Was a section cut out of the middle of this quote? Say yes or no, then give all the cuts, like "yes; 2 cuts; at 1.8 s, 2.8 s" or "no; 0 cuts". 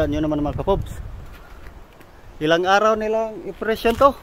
no; 0 cuts